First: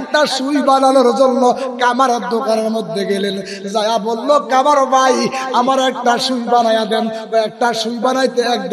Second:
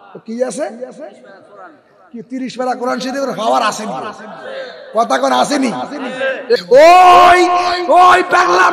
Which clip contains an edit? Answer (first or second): second